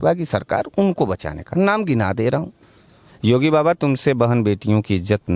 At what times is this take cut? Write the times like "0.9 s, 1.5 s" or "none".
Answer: 3.0 s